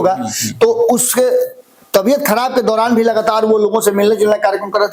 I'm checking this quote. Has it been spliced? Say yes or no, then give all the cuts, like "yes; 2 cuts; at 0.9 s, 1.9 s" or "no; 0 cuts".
no; 0 cuts